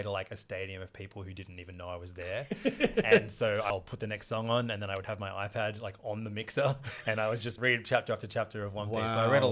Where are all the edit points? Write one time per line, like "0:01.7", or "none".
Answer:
0:03.7
0:07.6